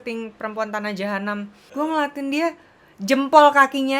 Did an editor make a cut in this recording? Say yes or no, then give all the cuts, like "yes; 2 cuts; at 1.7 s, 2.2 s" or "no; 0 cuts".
yes; 1 cut; at 1.6 s